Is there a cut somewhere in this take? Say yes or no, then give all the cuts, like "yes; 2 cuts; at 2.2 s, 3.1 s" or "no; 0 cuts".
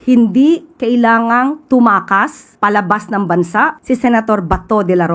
yes; 2 cuts; at 2.4 s, 3.8 s